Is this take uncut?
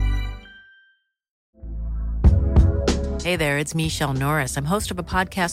no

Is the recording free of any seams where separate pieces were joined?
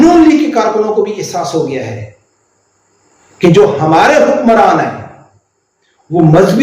yes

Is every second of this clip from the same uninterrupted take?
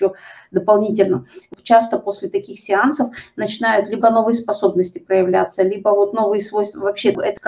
no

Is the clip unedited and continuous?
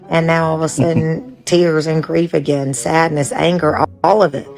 yes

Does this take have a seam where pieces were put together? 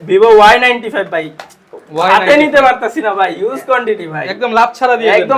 no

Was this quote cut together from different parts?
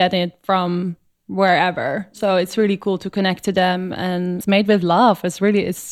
yes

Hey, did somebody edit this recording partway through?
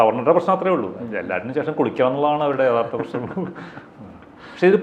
no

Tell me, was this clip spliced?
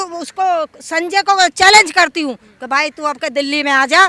no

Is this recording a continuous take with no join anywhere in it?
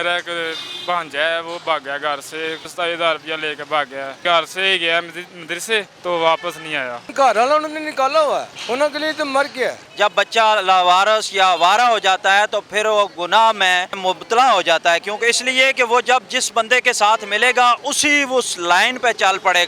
no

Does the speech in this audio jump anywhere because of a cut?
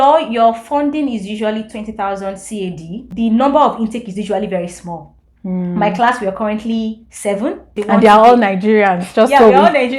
yes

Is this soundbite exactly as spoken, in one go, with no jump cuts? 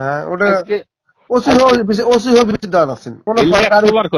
no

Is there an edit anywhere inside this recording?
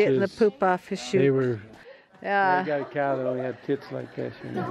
yes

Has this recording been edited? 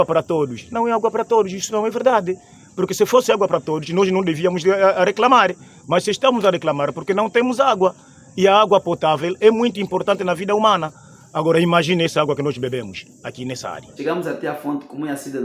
no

